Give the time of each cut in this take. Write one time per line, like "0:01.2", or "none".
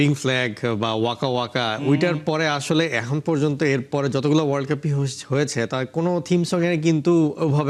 none